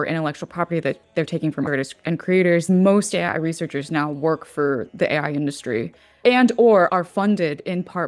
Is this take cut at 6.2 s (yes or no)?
yes